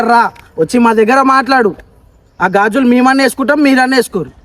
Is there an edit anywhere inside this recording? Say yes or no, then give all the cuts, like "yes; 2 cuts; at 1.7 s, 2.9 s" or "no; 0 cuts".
no; 0 cuts